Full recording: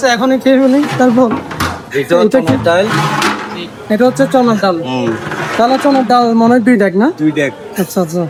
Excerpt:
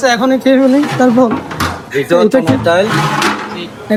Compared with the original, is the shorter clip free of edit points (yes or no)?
yes